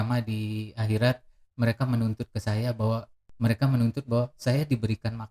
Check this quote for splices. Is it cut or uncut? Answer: cut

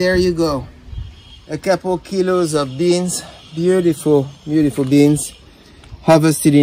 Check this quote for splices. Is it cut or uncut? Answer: uncut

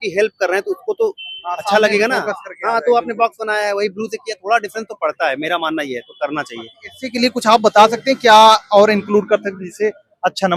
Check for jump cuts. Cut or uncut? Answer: uncut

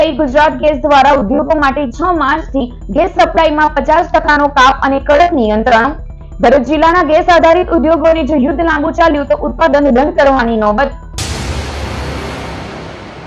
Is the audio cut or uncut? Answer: cut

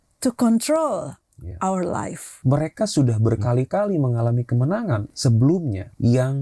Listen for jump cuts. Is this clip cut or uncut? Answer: cut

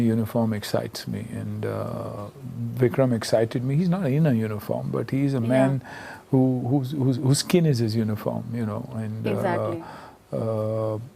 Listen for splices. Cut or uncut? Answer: uncut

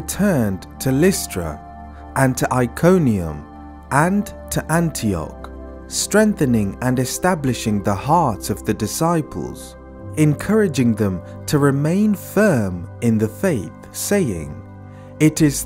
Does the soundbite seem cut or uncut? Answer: uncut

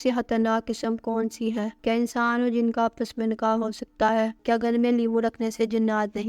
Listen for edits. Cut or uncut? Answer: cut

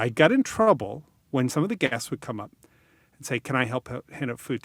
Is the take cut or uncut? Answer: cut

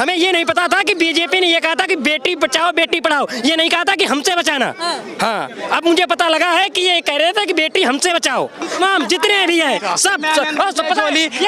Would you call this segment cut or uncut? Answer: cut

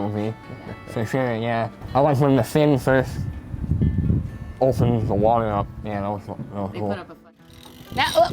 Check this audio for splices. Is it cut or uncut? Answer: cut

